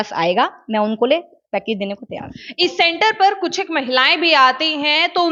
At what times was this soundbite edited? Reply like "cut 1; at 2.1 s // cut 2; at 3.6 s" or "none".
none